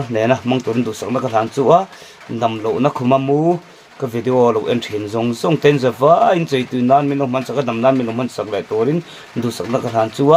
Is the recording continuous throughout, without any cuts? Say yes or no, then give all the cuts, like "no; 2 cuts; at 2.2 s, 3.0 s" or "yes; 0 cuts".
yes; 0 cuts